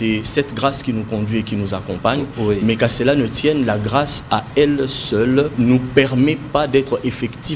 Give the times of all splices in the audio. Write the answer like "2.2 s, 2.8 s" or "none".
5.5 s